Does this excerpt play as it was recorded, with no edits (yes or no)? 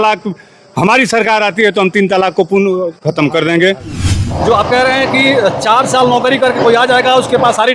no